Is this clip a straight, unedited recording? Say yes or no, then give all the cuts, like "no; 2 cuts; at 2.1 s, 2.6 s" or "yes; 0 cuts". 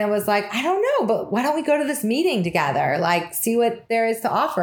yes; 0 cuts